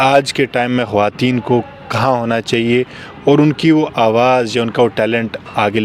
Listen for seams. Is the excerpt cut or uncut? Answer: uncut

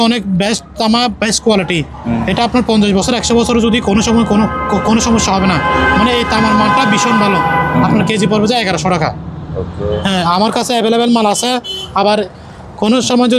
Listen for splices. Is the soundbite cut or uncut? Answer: uncut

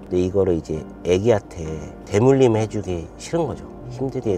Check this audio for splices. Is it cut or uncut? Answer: uncut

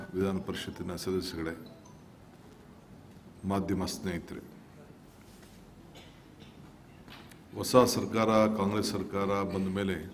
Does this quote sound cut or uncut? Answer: uncut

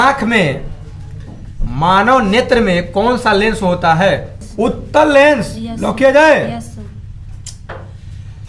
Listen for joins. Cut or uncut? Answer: cut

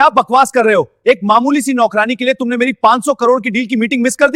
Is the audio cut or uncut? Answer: uncut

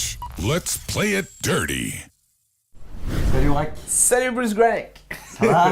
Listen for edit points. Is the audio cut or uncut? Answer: uncut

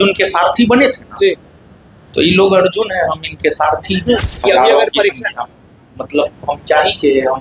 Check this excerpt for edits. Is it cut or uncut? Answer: cut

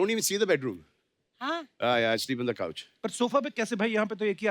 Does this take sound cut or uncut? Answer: uncut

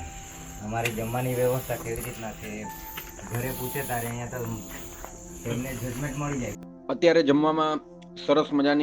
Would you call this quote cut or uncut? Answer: cut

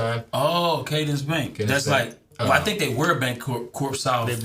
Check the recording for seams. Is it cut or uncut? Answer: cut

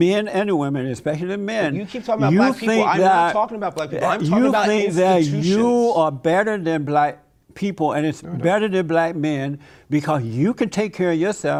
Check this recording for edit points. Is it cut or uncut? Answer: uncut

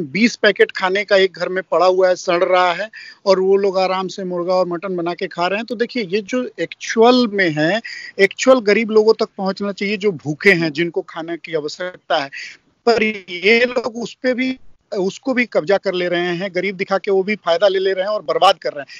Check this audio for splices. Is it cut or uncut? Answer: uncut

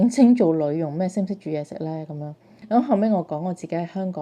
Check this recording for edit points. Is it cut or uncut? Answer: cut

